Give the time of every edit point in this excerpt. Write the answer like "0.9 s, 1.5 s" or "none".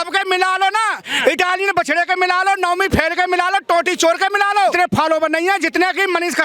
4.7 s

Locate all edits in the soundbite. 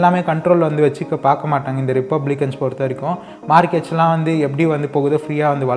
none

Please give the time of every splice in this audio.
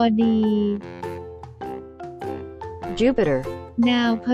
0.8 s, 3.0 s

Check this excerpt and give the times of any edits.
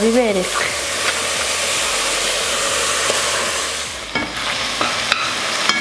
3.8 s

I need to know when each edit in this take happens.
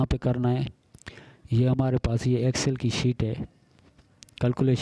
none

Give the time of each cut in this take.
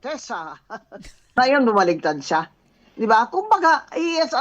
1.4 s

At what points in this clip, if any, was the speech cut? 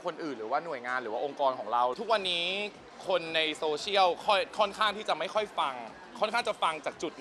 1.9 s

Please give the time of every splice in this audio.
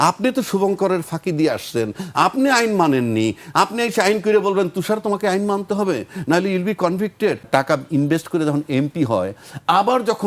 7.5 s

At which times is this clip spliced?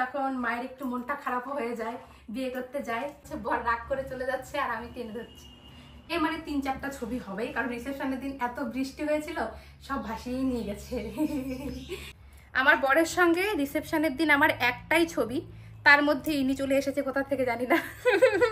3.3 s, 6.1 s, 12.0 s

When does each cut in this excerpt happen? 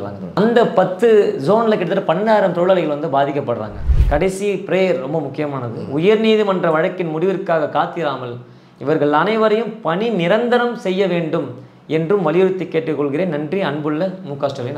3.8 s

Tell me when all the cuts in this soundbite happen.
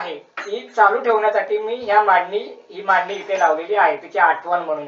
none

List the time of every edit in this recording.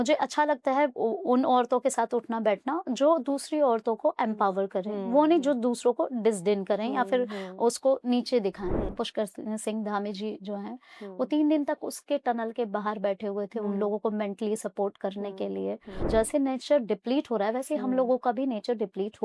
8.9 s, 16.0 s

